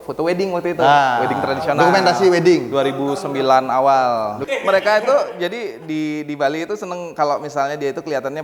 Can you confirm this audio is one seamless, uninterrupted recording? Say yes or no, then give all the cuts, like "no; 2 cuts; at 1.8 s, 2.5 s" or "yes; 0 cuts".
no; 1 cut; at 4.4 s